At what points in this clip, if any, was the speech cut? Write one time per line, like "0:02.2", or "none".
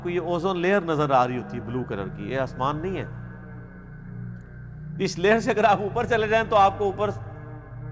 none